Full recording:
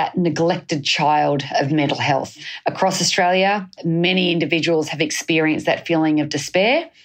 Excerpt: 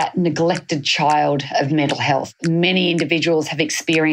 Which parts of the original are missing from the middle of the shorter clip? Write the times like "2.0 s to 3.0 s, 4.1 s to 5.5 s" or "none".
2.3 s to 3.7 s